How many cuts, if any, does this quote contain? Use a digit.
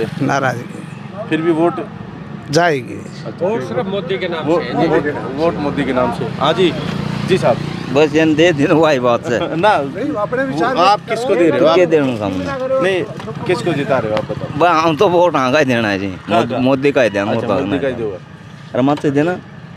0